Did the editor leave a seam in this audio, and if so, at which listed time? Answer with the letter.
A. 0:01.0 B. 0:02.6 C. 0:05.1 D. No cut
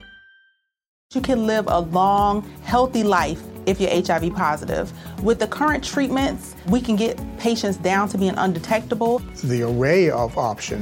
A